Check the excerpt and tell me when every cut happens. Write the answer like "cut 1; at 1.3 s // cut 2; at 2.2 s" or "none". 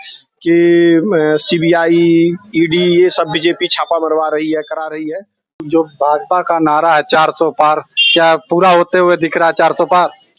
cut 1; at 5.7 s